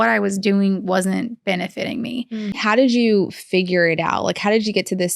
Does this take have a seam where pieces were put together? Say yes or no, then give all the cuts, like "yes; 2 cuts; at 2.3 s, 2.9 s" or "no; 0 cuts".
yes; 1 cut; at 2.6 s